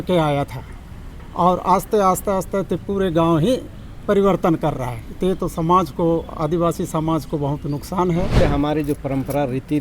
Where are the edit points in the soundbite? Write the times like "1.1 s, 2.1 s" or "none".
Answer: 8.3 s